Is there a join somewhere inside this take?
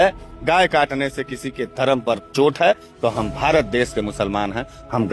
no; 0 cuts

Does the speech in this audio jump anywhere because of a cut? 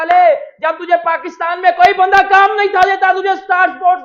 no; 0 cuts

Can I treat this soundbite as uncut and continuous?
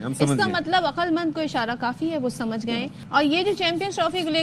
yes; 0 cuts

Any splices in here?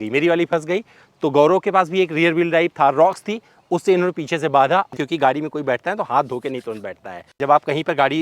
yes; 2 cuts; at 4.9 s, 7.3 s

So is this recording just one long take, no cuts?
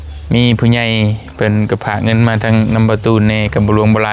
yes; 0 cuts

